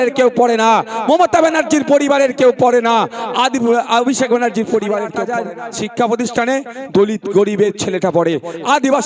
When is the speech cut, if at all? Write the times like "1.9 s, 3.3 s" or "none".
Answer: 5.2 s